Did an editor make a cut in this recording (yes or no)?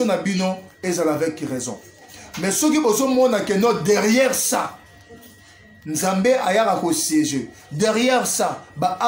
no